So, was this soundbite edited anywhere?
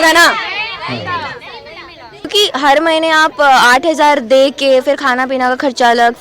yes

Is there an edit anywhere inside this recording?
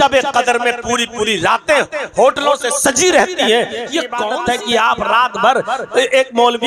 yes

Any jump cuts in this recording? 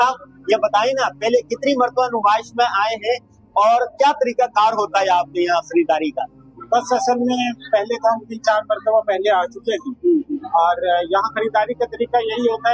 no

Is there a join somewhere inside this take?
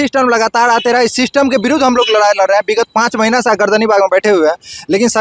no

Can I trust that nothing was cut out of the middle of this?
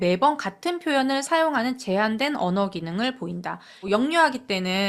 no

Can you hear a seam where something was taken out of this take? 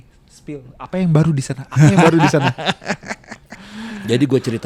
no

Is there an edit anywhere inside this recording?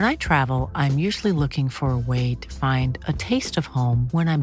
no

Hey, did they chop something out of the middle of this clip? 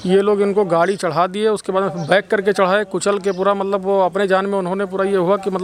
no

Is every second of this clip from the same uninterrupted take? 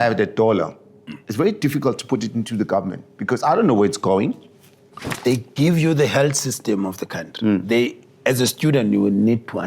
no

